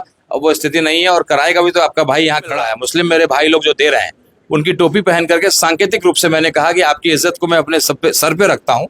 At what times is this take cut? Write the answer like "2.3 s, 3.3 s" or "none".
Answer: 2.7 s